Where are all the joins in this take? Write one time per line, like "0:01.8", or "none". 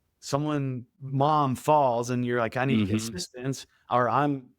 0:00.9